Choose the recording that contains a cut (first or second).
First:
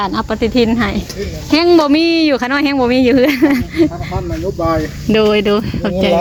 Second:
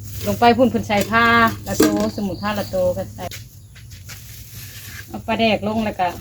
second